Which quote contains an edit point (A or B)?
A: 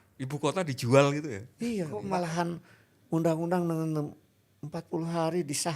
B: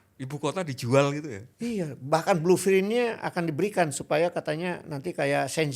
A